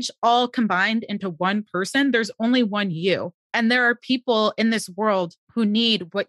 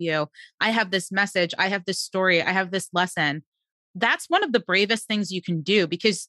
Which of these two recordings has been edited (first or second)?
first